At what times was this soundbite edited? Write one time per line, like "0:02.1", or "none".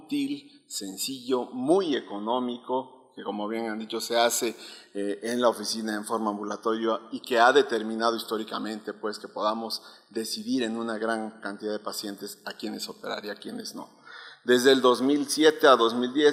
none